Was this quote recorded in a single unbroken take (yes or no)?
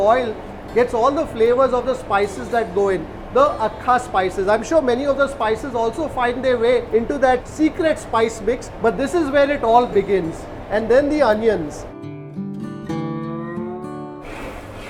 yes